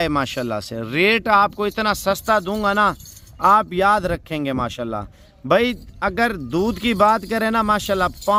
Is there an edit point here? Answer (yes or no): no